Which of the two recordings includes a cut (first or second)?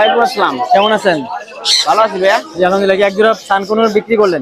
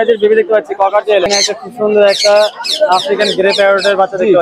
second